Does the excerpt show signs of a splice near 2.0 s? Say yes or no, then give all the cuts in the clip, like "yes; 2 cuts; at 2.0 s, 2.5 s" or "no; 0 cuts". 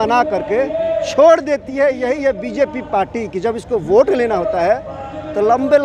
no; 0 cuts